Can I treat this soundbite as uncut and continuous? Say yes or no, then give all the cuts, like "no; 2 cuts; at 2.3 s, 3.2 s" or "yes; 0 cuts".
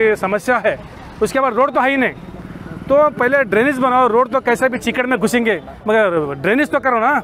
yes; 0 cuts